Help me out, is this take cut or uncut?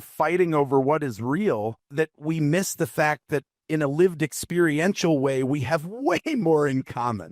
cut